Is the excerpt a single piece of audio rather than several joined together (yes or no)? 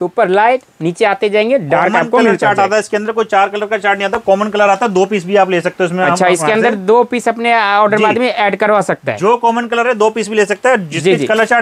yes